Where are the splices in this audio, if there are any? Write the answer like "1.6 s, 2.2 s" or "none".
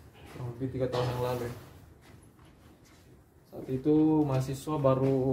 none